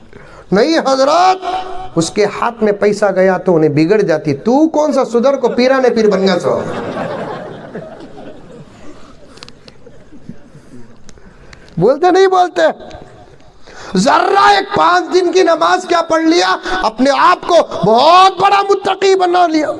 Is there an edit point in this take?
no; 0 cuts

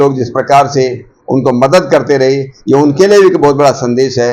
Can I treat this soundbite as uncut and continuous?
yes; 0 cuts

